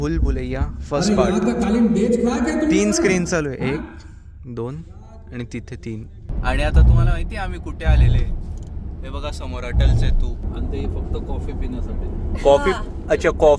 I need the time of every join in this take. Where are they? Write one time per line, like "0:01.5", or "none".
0:06.3
0:10.4